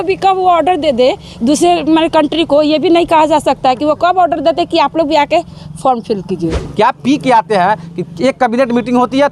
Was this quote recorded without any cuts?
no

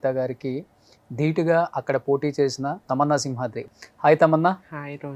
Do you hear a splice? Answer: yes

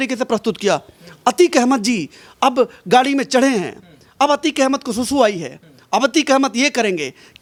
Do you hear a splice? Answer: no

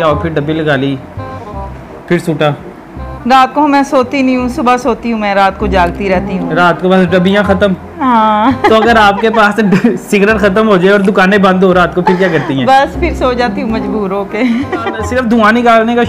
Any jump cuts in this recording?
no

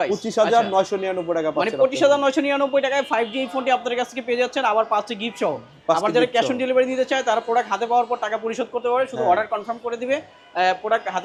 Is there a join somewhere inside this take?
no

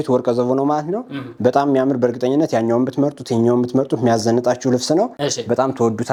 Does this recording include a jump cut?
no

